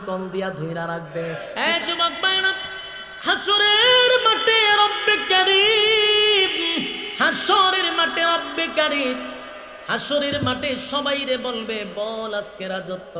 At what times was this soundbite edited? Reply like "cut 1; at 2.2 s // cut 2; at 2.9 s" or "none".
cut 1; at 1.4 s